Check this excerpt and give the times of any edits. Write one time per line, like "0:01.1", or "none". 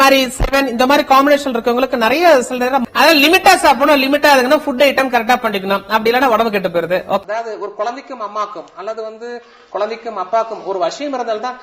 0:02.8
0:07.2